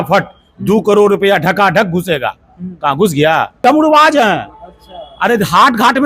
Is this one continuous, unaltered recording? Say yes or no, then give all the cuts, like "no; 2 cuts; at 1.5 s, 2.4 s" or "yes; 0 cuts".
no; 1 cut; at 3.6 s